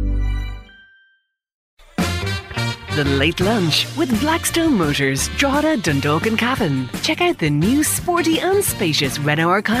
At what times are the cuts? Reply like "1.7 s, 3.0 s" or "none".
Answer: 1.6 s